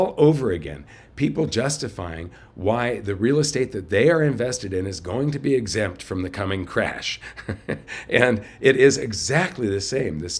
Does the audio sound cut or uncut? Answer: uncut